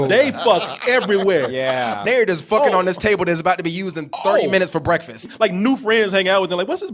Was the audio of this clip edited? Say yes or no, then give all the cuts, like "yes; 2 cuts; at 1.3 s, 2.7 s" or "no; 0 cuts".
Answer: yes; 2 cuts; at 2.0 s, 5.2 s